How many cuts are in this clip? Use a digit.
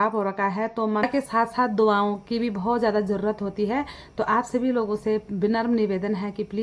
1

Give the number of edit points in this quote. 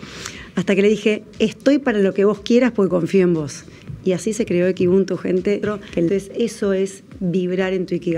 1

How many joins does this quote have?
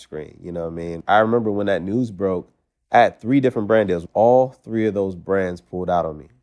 2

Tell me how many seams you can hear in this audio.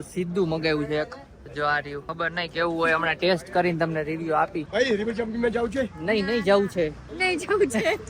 3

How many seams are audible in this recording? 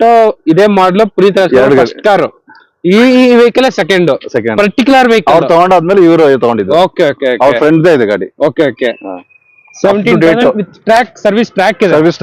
1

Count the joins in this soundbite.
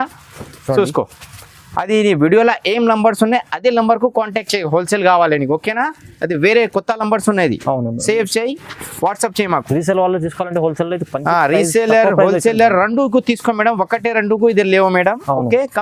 0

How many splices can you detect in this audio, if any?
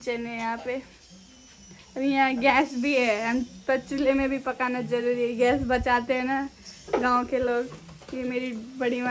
0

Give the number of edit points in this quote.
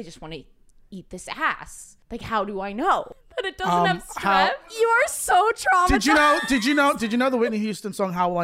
2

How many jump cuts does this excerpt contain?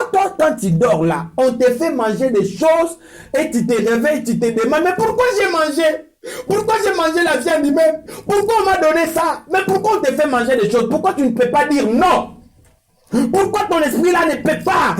0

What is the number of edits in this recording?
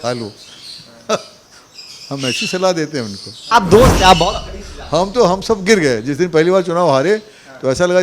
1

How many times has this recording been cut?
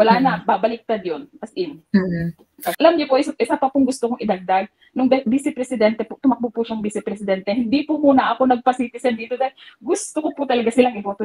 1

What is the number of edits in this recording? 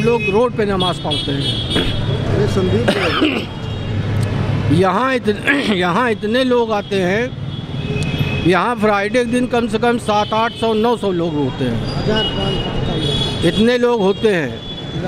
0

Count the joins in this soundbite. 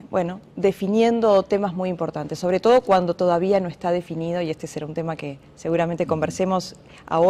0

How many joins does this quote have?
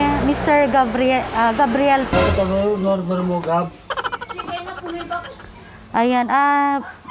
1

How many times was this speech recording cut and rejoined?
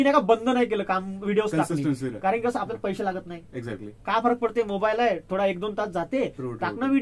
0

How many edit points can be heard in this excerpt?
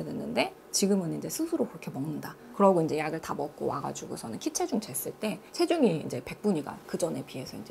1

